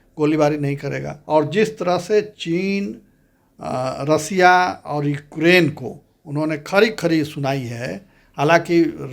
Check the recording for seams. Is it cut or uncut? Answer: cut